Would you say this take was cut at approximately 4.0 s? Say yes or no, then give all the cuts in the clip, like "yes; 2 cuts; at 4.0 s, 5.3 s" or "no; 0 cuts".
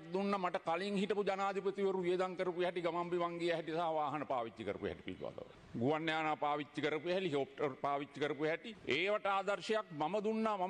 no; 2 cuts; at 5.5 s, 8.7 s